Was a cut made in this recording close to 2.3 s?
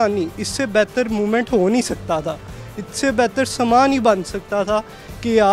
no; 0 cuts

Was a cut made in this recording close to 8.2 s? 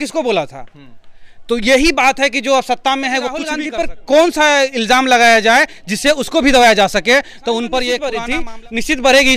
yes; 2 cuts; at 3.6 s, 8.2 s

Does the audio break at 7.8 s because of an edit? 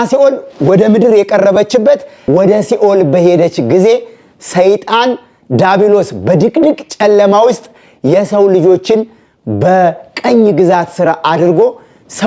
no; 1 cut; at 2.1 s

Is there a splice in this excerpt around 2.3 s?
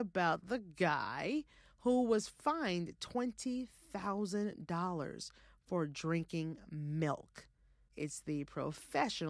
no; 0 cuts

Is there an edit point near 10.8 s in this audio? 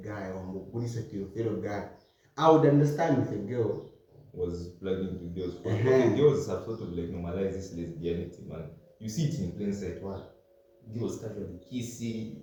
no; 0 cuts

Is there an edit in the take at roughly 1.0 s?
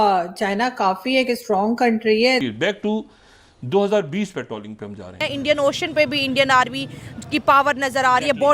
no; 2 cuts; at 2.4 s, 5.2 s

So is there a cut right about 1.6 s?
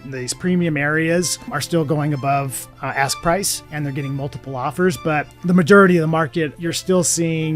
yes; 4 cuts; at 1.6 s, 3.6 s, 5.3 s, 6.6 s

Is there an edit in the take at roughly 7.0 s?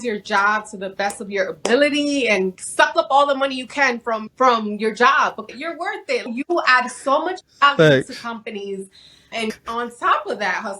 no; 4 cuts; at 2.6 s, 4.3 s, 5.8 s, 9.5 s

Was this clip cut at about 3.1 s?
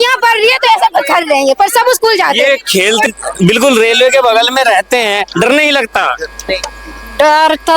yes; 1 cut; at 3.1 s

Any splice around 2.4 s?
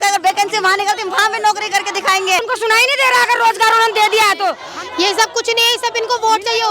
yes; 2 cuts; at 2.4 s, 4.7 s

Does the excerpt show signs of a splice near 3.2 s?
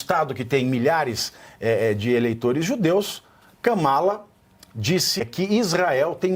no; 1 cut; at 5.2 s

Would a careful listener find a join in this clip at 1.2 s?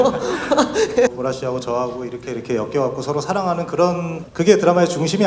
yes; 2 cuts; at 1.2 s, 4.2 s

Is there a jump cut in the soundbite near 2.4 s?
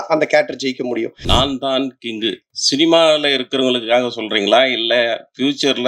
no; 1 cut; at 1.1 s

